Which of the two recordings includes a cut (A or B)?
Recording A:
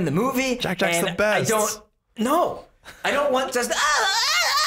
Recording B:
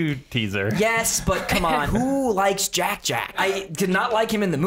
B